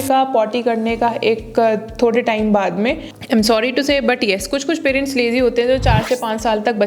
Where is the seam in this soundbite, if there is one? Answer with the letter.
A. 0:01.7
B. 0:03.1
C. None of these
B